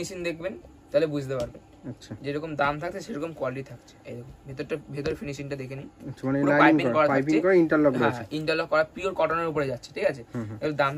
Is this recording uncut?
yes; 0 cuts

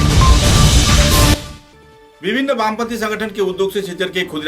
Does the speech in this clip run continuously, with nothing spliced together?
no; 1 cut; at 1.4 s

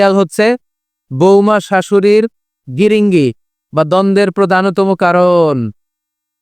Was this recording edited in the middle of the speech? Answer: no; 0 cuts

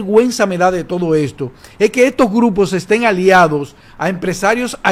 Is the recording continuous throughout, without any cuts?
yes; 0 cuts

